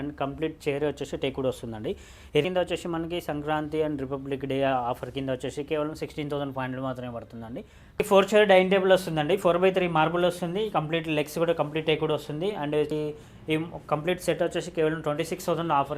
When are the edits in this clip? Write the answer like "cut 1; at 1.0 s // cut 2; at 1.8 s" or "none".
cut 1; at 2.4 s // cut 2; at 8.0 s // cut 3; at 12.9 s